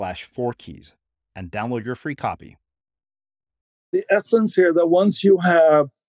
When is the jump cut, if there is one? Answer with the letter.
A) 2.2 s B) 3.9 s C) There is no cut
B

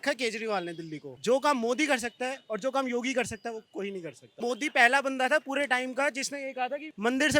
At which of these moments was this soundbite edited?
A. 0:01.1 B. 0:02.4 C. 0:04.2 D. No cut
A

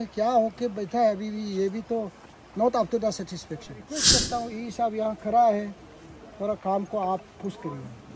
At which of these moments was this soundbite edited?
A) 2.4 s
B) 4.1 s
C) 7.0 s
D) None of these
B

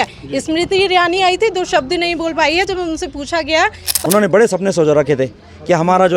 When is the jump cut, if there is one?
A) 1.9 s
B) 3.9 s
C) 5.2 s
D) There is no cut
B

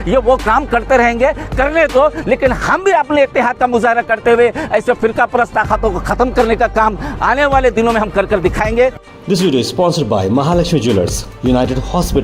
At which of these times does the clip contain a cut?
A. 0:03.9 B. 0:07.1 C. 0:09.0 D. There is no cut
C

